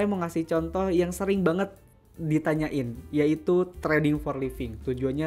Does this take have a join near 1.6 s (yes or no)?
no